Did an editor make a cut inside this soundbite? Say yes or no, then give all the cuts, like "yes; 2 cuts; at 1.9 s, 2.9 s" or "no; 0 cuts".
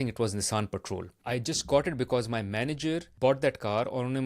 yes; 2 cuts; at 1.1 s, 3.1 s